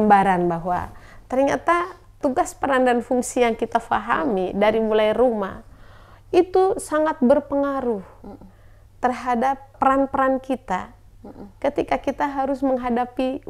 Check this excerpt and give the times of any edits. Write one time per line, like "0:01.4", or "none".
0:02.2
0:09.7